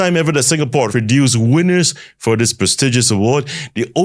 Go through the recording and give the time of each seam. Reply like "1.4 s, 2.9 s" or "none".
0.9 s

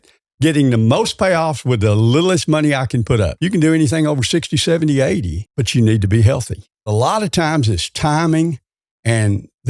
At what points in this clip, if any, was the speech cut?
3.3 s, 5.4 s, 6.9 s

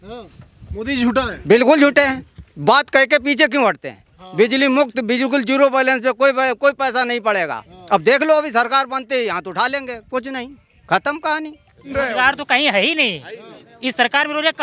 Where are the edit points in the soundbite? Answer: 11.9 s

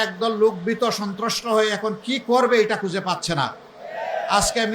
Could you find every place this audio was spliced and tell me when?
none

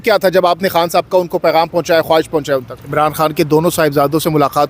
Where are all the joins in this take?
2.8 s

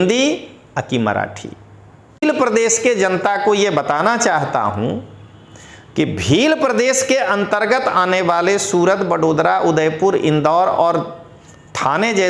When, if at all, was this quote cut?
2.2 s

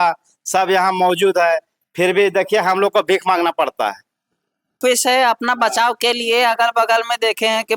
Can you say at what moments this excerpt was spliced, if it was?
4.8 s

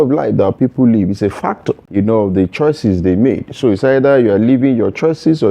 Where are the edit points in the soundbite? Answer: 1.8 s

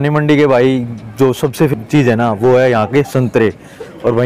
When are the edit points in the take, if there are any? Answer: 1.7 s

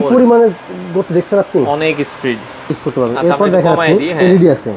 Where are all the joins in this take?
2.8 s

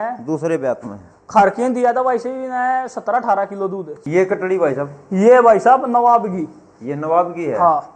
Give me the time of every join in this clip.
3.9 s

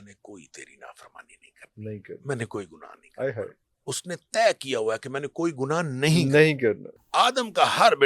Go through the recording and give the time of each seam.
6.9 s

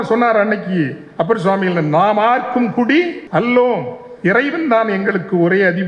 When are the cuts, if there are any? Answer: 3.2 s

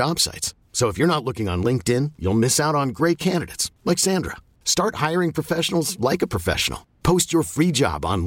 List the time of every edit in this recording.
none

